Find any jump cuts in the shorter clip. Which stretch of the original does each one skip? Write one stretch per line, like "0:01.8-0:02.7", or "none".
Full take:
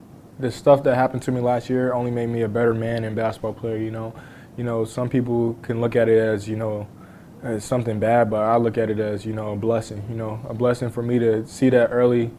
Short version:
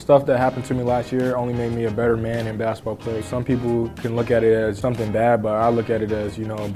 0:03.8-0:04.9
0:06.4-0:07.7